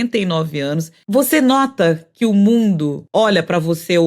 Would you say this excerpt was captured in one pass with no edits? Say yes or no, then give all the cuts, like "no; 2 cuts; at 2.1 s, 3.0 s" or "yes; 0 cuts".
no; 2 cuts; at 1.0 s, 3.0 s